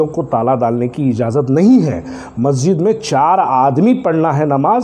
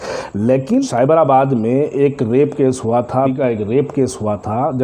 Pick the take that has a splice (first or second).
second